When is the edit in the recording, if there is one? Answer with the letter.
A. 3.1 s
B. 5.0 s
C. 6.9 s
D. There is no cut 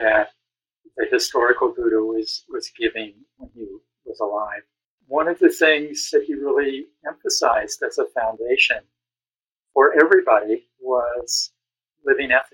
B